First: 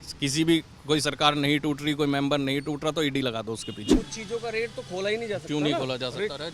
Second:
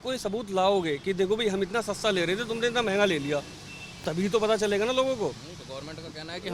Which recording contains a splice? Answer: first; 1 cut; at 3.9 s

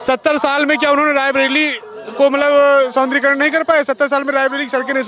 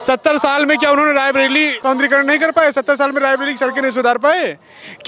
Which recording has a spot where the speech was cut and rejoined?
second; 1 cut; at 1.8 s

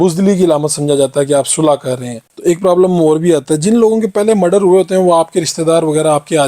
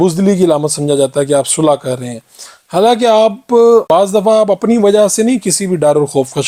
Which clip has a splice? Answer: first; 1 cut; at 2.3 s

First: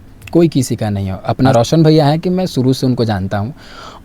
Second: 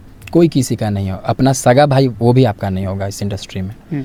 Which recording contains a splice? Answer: first; 1 cut; at 1.5 s

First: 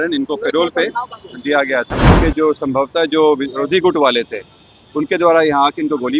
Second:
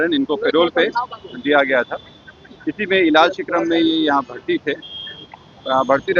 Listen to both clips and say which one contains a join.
first; 1 cut; at 2.2 s

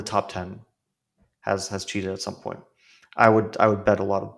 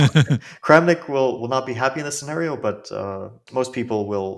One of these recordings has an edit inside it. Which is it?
second; 1 cut; at 3.4 s

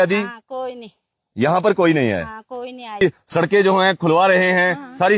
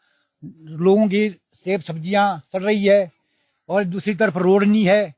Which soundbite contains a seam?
first; 1 cut; at 3.0 s

